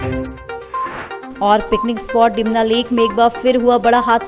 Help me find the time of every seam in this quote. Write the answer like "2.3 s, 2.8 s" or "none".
1.3 s

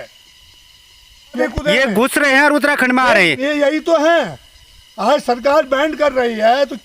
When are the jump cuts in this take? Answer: 1.4 s

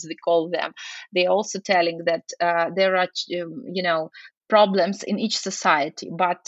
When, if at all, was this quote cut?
4.3 s

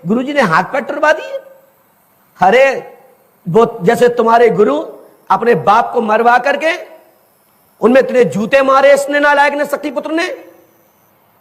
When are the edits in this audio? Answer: none

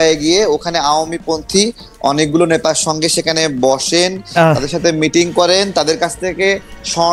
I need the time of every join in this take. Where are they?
none

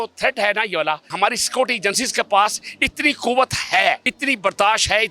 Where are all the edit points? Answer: 1.1 s, 4.1 s

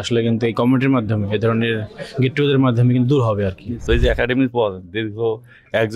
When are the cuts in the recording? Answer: 3.8 s

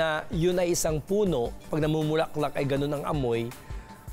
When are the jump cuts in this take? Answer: 1.7 s

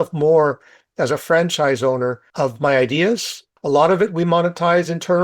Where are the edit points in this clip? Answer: 2.2 s, 3.5 s

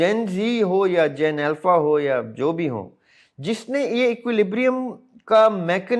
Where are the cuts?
none

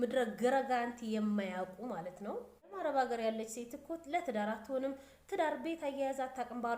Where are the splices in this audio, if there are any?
2.7 s

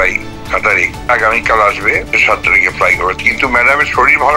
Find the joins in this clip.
1.1 s, 2.1 s

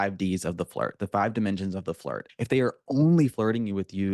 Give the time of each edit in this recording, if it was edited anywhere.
2.2 s

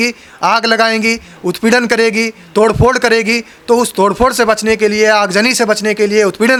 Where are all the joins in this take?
none

